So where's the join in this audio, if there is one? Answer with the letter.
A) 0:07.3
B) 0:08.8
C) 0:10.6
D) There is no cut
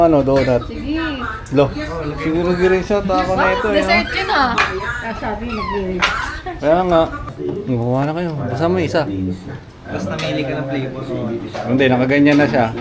A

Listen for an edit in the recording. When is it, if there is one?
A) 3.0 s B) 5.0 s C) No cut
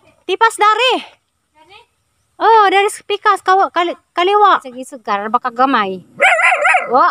B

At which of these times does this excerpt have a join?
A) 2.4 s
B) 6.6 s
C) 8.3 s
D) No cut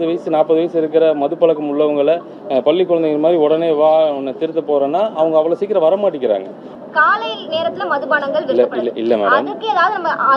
B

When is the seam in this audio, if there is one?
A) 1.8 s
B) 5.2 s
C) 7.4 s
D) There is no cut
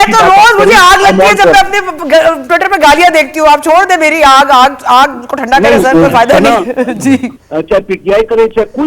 C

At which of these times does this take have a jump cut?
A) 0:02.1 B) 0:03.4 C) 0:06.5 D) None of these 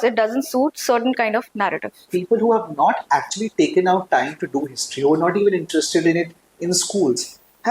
A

